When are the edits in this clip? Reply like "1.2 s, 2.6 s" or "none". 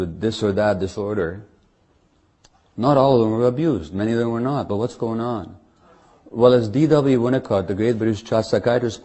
2.7 s